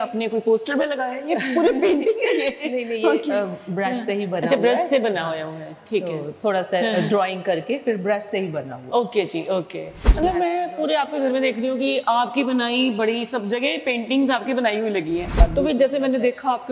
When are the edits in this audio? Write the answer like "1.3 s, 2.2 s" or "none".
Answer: 10.1 s, 15.4 s